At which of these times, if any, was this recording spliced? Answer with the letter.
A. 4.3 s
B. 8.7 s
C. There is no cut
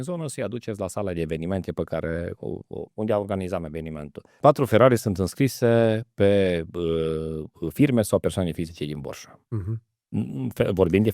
A